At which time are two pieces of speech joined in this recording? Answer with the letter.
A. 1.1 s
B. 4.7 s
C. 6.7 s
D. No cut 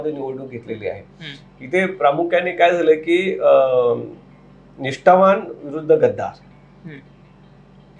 D